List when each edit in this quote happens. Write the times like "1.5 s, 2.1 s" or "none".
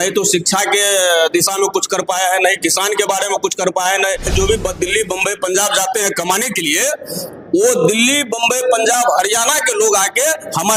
4.3 s